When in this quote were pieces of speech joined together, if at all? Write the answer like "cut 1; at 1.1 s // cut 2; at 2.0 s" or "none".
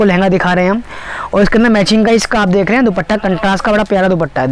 none